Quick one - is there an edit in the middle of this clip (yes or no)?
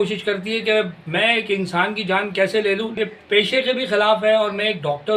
yes